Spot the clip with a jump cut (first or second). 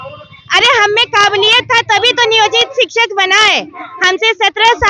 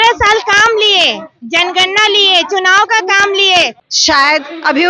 second